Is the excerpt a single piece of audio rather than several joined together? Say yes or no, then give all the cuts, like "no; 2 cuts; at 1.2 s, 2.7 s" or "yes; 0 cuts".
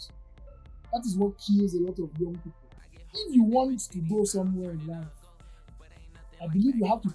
no; 1 cut; at 2.9 s